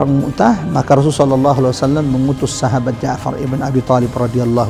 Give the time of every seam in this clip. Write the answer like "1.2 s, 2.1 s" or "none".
none